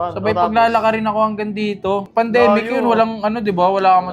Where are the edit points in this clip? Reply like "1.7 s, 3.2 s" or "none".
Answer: 2.1 s